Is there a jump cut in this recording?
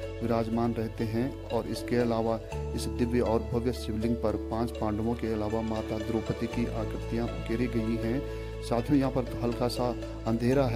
no; 0 cuts

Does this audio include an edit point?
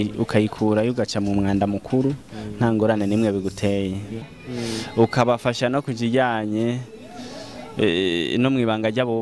yes; 1 cut; at 4.4 s

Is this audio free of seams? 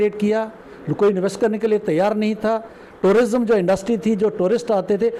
yes; 0 cuts

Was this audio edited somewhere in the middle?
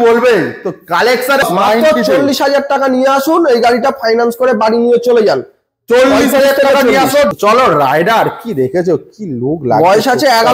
yes; 2 cuts; at 1.4 s, 7.3 s

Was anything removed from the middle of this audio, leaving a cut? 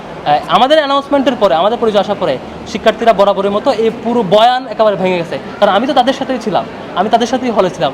no; 0 cuts

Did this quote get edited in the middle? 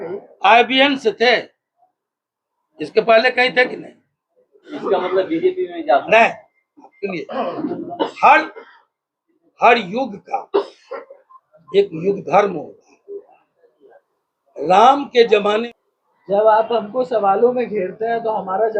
yes; 2 cuts; at 4.7 s, 15.6 s

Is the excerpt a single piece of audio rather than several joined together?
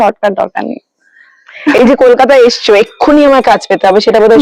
yes; 0 cuts

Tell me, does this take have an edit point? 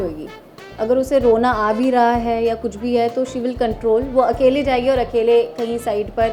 no; 0 cuts

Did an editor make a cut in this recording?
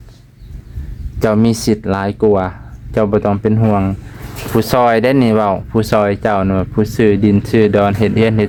no; 0 cuts

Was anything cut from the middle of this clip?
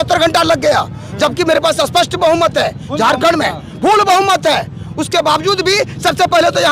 no; 0 cuts

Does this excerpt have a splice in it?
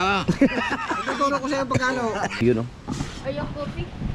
yes; 1 cut; at 2.4 s

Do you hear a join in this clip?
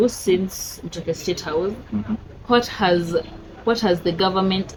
no; 0 cuts

